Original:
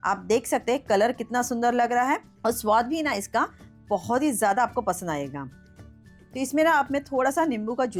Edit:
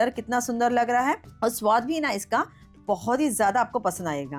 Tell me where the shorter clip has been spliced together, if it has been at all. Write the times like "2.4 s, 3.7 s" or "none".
none

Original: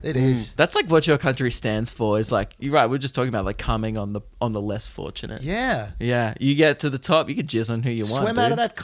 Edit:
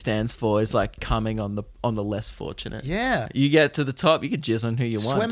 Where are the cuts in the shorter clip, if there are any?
1.0 s, 3.3 s

